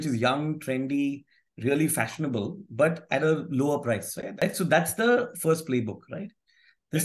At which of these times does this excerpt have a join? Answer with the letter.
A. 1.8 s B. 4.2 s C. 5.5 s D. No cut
B